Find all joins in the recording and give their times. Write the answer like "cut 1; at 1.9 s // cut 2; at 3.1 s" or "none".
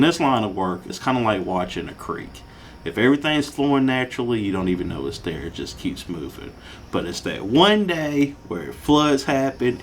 cut 1; at 0.9 s